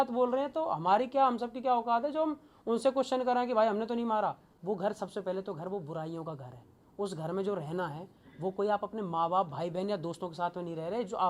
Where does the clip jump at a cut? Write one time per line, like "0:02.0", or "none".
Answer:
0:04.5